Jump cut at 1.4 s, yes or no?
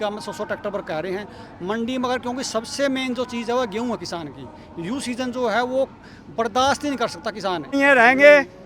no